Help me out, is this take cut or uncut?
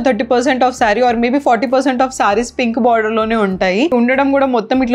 cut